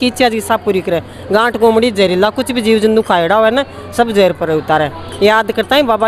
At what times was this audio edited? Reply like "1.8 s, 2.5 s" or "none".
none